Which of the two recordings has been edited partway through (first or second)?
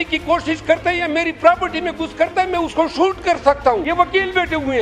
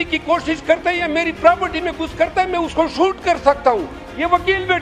first